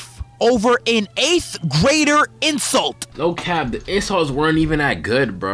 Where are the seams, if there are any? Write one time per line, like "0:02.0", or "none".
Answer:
0:03.1

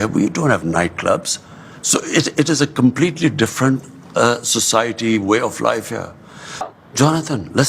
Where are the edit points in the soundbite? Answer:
0:06.7

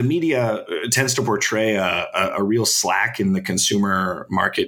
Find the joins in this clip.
none

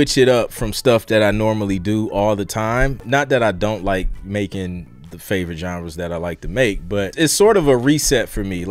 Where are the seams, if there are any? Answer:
0:03.0
0:04.9
0:07.1

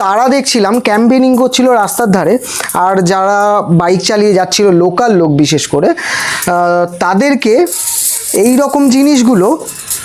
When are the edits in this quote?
none

